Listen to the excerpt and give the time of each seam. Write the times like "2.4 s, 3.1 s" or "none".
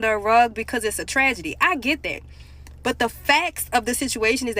none